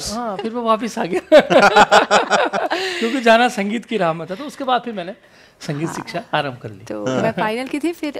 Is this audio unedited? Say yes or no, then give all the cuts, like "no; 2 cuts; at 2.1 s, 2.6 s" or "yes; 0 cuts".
yes; 0 cuts